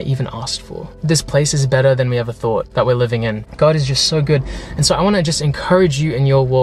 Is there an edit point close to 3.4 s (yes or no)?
yes